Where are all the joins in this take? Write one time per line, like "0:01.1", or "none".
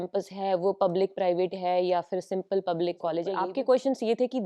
0:03.3